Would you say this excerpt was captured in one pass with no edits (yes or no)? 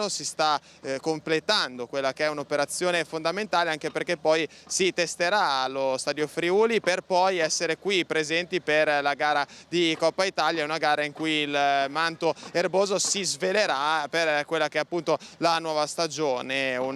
yes